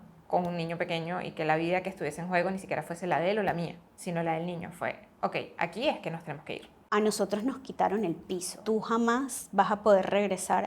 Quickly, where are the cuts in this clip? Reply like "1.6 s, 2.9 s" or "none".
3.9 s, 6.8 s, 8.5 s